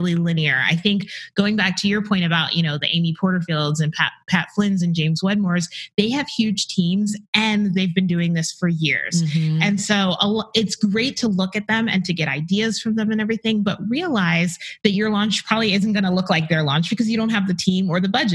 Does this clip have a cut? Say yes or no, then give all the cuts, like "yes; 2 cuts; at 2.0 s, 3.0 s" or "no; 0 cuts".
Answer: no; 0 cuts